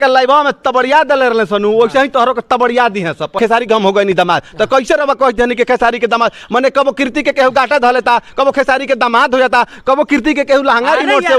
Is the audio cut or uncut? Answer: cut